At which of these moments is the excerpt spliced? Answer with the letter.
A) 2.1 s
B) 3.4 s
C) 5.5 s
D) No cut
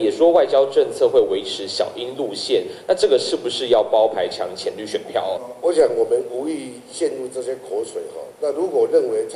C